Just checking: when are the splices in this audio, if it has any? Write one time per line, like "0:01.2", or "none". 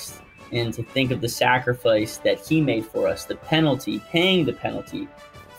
none